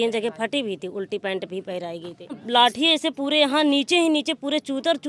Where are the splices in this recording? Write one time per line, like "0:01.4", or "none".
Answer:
0:02.4